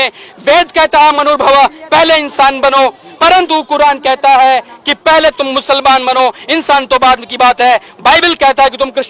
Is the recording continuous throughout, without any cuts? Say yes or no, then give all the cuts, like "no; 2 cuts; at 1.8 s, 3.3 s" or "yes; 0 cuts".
yes; 0 cuts